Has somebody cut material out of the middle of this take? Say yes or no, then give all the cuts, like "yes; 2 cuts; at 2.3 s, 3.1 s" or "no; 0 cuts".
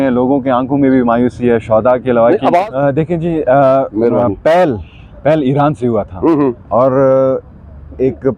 yes; 1 cut; at 2.7 s